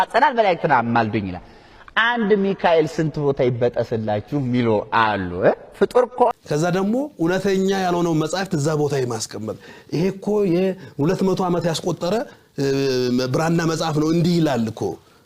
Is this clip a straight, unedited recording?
no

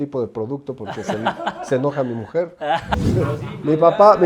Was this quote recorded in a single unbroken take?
no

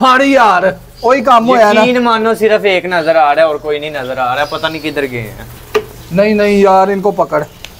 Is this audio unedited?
yes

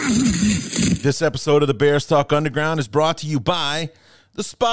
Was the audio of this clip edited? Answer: yes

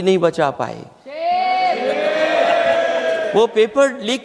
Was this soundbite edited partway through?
no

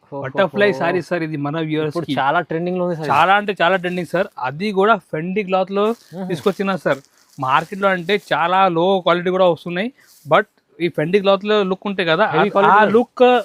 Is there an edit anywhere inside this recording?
no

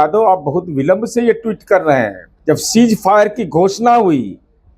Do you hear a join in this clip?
yes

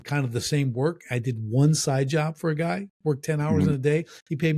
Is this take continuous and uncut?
yes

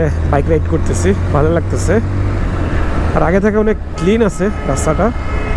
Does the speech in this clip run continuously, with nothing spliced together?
yes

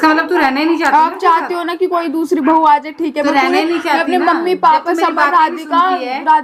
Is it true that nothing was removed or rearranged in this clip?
yes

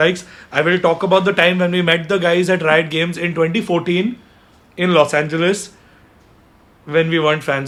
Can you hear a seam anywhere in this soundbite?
no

